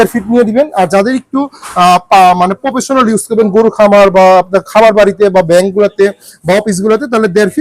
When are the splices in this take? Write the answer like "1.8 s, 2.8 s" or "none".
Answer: none